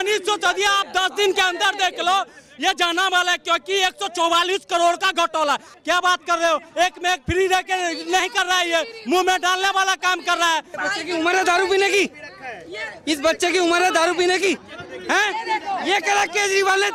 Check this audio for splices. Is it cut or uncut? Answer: cut